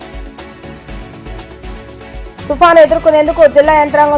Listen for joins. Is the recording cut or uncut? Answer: cut